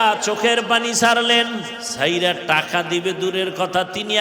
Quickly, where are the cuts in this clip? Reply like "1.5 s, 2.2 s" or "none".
1.8 s